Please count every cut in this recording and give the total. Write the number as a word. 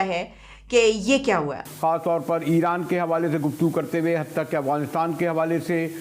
one